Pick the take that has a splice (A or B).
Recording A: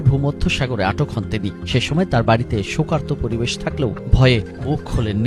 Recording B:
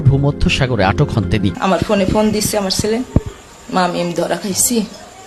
B